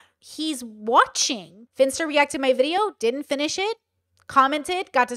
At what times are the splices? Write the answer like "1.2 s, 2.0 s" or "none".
1.6 s